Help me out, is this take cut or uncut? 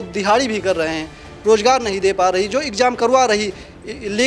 uncut